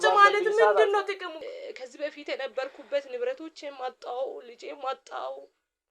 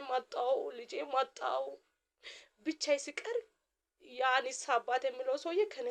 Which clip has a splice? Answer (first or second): first